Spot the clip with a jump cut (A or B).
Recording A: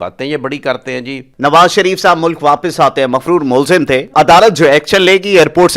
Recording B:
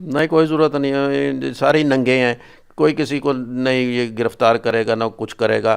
A